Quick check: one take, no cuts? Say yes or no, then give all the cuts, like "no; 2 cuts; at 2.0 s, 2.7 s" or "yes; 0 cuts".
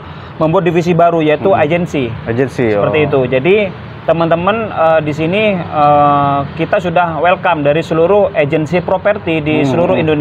yes; 0 cuts